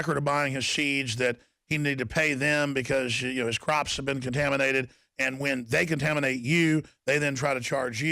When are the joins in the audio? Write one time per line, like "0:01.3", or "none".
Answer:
0:06.1